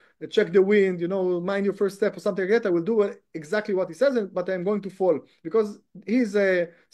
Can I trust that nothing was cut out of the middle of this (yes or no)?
yes